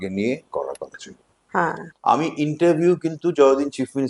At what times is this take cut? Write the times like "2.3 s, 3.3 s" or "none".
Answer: 1.9 s